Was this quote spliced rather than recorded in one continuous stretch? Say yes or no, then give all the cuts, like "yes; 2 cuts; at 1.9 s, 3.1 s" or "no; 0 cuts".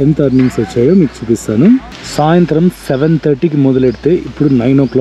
yes; 1 cut; at 2.0 s